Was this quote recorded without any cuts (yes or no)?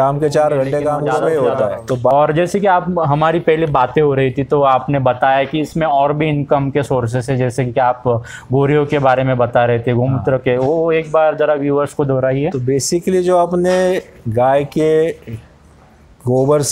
no